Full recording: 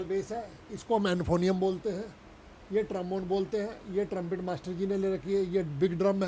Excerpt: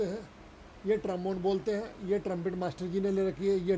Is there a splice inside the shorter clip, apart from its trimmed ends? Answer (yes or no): no